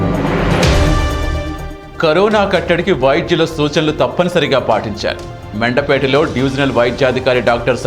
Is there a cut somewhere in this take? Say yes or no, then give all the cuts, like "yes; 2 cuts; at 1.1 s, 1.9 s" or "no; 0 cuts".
yes; 1 cut; at 1.2 s